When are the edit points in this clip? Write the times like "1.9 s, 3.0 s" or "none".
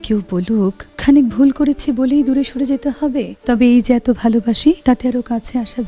0.9 s, 3.3 s, 4.8 s